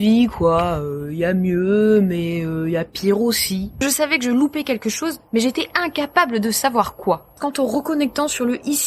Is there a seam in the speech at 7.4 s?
yes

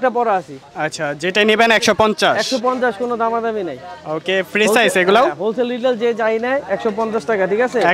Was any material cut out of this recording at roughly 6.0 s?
no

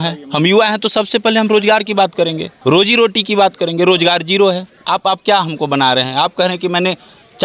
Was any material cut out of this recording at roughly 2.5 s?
yes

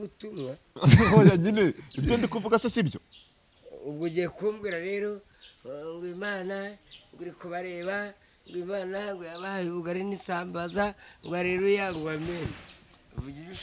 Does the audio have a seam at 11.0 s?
no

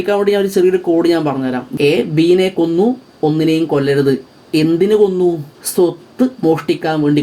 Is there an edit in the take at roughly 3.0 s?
no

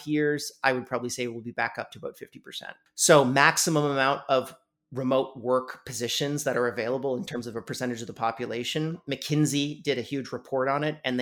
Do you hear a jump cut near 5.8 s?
no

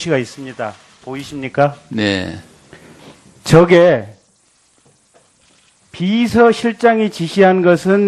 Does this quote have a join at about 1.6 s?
no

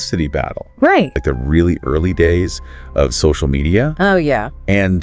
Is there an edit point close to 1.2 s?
yes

